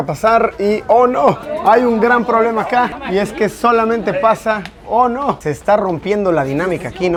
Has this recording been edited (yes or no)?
no